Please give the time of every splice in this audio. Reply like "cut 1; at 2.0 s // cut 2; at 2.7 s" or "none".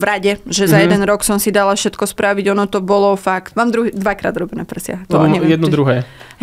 cut 1; at 3.5 s